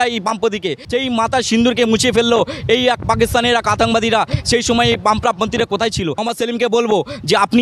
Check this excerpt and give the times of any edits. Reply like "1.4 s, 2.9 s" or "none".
0.8 s, 6.2 s